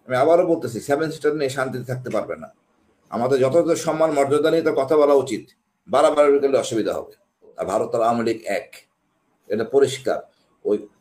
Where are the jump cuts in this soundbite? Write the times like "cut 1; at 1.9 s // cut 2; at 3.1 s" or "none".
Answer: cut 1; at 7.5 s